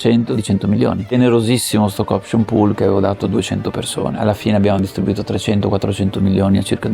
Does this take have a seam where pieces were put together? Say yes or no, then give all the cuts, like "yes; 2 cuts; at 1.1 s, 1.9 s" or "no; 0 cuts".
yes; 2 cuts; at 1.0 s, 4.2 s